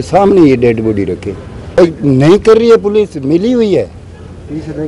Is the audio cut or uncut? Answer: cut